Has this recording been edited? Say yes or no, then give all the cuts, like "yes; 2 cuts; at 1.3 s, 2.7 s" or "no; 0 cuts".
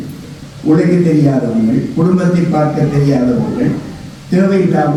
no; 0 cuts